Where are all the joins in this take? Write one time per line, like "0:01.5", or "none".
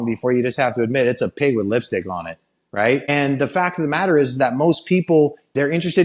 none